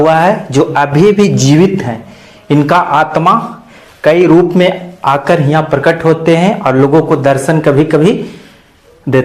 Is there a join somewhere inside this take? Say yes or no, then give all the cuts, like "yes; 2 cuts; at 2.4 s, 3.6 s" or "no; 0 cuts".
no; 0 cuts